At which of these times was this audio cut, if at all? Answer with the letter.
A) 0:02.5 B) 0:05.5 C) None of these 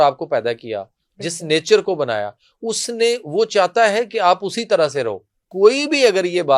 B